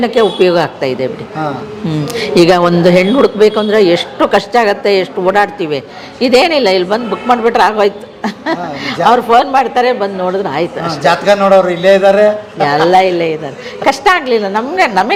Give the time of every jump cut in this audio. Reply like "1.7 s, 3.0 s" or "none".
none